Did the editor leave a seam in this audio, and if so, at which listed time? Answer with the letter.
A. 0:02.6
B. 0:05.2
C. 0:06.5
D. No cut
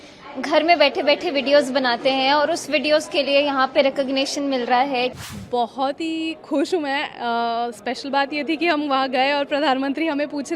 B